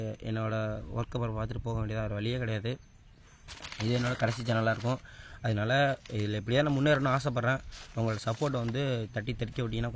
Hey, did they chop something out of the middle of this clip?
no; 0 cuts

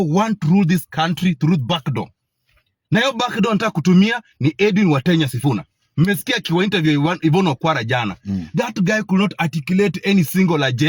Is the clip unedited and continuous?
yes; 0 cuts

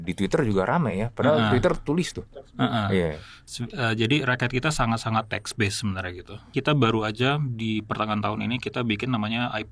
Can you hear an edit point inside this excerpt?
yes; 1 cut; at 6.5 s

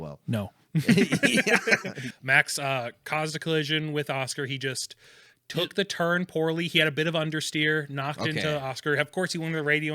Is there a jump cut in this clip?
yes; 1 cut; at 2.0 s

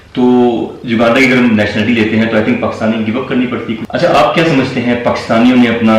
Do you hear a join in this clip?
yes; 1 cut; at 3.8 s

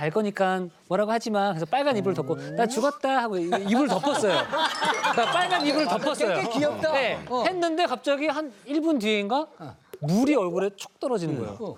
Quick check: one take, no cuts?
yes; 0 cuts

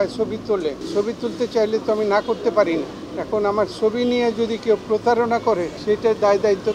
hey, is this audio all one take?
no; 3 cuts; at 0.8 s, 3.0 s, 5.7 s

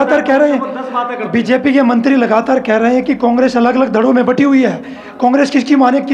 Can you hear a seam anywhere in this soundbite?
no; 0 cuts

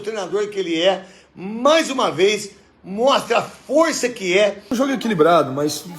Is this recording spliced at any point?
yes; 1 cut; at 4.7 s

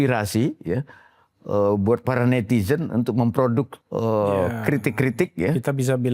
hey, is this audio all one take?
no; 1 cut; at 3.8 s

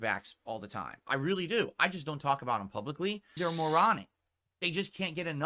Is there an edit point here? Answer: yes; 1 cut; at 3.3 s

